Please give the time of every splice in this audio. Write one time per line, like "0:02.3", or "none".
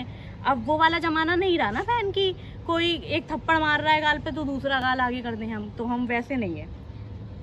none